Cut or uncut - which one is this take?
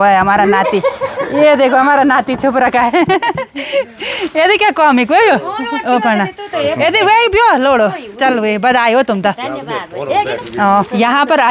uncut